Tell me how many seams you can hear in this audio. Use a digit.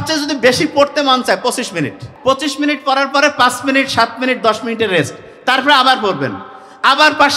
1